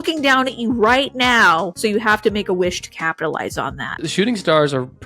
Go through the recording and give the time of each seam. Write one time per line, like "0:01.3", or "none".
0:01.7
0:04.0